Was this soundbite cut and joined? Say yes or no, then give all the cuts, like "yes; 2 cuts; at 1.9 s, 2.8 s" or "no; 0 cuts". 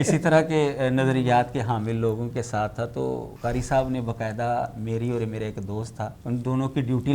yes; 2 cuts; at 3.3 s, 6.2 s